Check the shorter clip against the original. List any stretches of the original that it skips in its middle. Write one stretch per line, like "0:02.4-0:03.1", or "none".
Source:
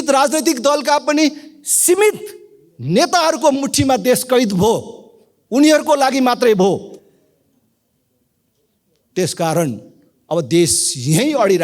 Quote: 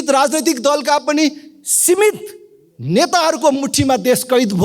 none